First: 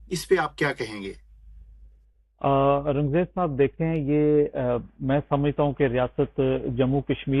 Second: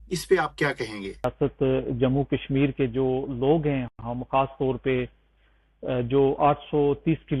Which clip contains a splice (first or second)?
second